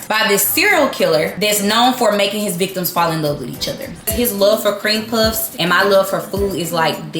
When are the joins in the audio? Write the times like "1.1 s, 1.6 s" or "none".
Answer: 4.1 s